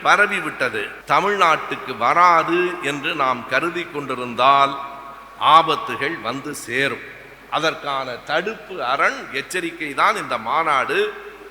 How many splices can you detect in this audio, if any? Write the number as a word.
one